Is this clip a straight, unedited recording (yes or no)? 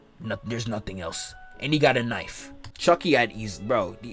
no